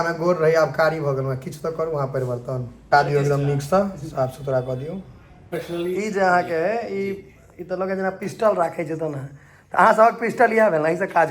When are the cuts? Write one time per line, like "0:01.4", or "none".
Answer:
0:02.7
0:05.6